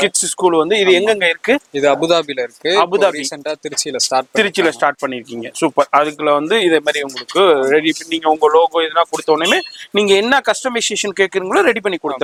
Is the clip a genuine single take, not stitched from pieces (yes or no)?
yes